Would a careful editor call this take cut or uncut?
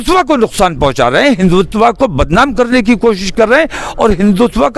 uncut